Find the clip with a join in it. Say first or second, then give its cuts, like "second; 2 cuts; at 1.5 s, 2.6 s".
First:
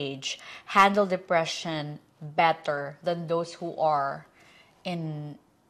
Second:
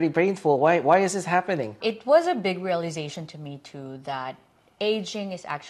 second; 1 cut; at 1.7 s